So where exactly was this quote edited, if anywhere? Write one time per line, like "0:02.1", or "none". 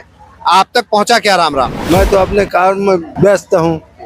0:01.8
0:03.1